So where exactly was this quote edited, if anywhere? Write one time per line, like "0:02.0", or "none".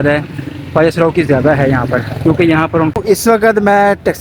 0:03.0